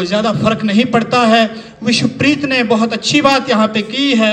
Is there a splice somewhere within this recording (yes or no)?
no